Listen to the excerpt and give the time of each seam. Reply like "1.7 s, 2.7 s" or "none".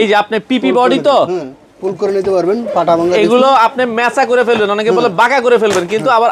none